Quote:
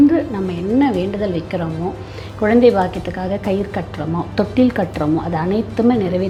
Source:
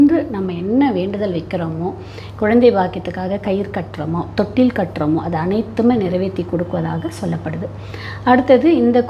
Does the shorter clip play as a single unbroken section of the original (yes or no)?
yes